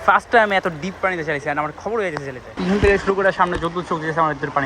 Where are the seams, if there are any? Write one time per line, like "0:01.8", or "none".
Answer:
0:02.5